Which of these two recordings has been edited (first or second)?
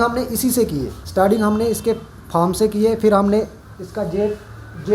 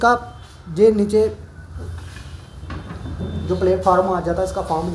first